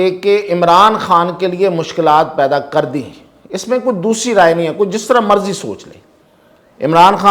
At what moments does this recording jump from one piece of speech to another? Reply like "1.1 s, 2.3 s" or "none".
none